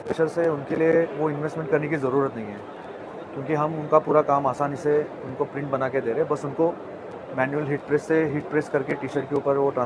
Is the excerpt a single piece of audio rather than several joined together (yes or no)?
yes